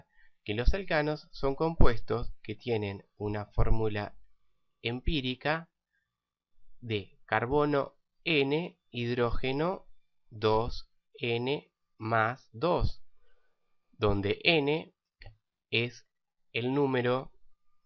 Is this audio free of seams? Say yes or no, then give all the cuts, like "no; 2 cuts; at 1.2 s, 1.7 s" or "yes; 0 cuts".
no; 1 cut; at 14.6 s